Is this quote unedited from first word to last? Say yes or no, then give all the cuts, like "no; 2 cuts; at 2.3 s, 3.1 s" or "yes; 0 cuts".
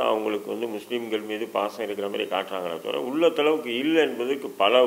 yes; 0 cuts